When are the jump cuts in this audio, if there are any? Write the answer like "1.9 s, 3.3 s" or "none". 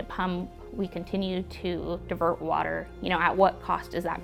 none